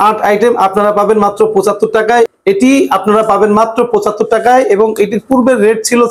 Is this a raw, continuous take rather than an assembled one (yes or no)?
no